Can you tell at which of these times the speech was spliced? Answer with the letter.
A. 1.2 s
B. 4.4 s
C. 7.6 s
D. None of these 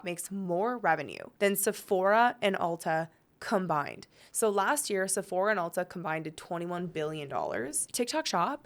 A